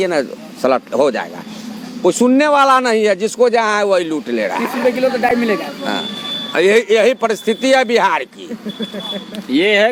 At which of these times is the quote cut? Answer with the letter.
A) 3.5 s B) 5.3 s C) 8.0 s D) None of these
D